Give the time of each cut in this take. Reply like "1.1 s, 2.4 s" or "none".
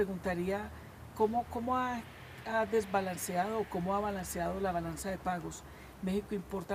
none